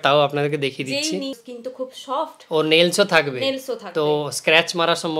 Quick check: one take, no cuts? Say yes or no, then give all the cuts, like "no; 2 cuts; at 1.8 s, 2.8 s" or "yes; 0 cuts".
no; 1 cut; at 1.5 s